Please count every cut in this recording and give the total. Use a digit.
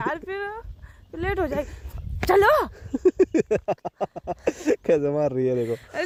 0